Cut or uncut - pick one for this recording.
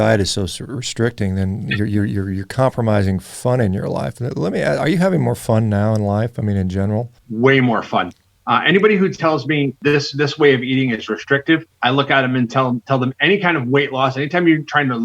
cut